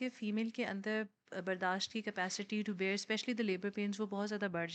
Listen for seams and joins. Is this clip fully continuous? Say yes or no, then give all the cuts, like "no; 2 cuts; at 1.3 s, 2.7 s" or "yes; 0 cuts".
yes; 0 cuts